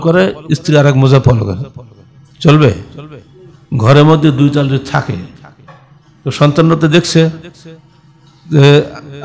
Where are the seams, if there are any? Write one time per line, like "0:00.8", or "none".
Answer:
none